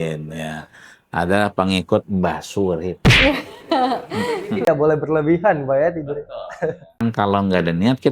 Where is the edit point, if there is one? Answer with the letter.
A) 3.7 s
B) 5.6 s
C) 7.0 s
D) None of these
C